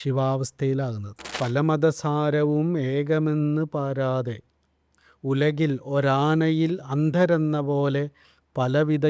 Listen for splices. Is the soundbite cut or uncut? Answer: cut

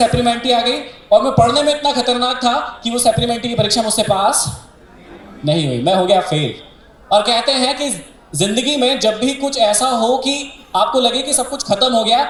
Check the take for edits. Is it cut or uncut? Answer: uncut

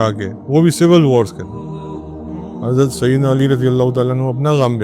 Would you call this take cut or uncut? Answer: uncut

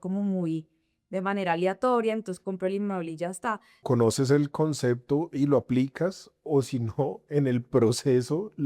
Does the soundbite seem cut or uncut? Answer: cut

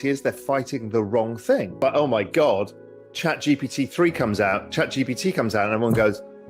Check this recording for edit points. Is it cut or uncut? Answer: cut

